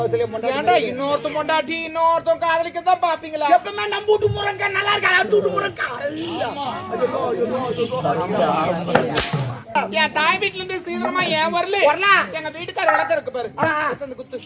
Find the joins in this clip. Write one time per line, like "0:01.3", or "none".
0:09.8